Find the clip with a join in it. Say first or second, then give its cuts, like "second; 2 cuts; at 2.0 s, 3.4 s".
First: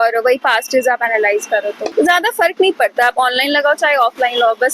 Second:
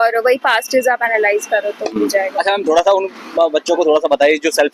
first; 1 cut; at 1.8 s